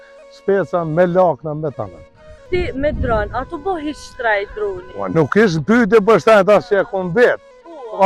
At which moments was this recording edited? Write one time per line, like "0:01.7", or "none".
0:02.4